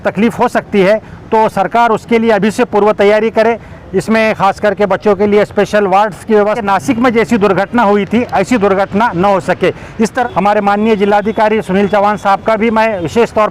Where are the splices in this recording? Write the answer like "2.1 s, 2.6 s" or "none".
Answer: 6.6 s, 10.2 s